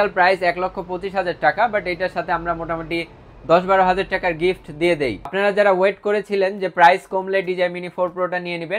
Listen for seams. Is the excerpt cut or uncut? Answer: cut